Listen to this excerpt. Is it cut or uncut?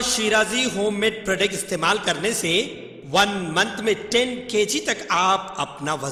uncut